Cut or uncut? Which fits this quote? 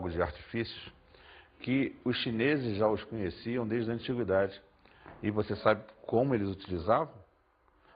cut